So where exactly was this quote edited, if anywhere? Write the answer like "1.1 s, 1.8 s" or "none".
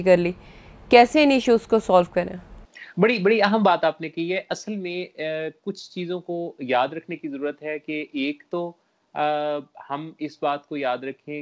none